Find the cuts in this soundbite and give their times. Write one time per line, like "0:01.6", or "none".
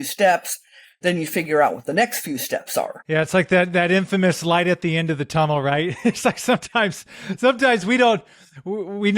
0:03.0